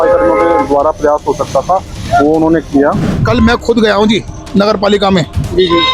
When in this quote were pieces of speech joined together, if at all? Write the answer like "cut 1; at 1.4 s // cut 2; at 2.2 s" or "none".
cut 1; at 3.1 s